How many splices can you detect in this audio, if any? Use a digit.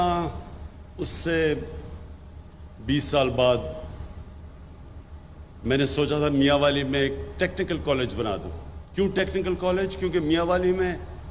2